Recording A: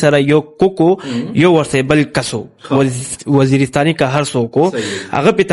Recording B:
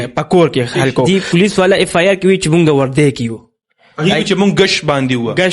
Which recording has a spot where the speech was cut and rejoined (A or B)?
B